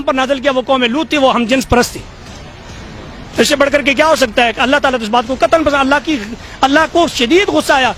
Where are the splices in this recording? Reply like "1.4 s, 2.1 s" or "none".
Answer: none